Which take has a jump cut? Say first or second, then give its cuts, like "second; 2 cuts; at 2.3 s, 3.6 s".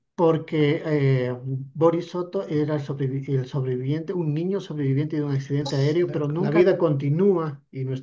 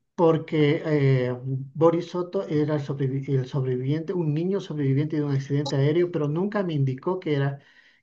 first; 1 cut; at 6.5 s